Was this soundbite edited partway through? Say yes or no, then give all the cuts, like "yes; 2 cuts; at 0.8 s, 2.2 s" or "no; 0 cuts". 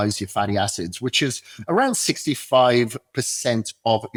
no; 0 cuts